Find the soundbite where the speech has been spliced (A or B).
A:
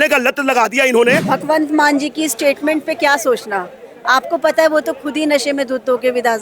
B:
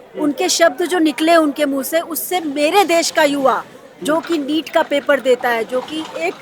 A